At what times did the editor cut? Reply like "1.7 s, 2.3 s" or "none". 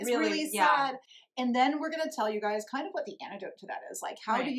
1.0 s